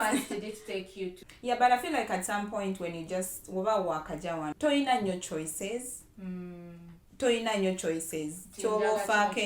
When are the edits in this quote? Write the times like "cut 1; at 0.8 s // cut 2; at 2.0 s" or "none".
cut 1; at 1.3 s // cut 2; at 4.5 s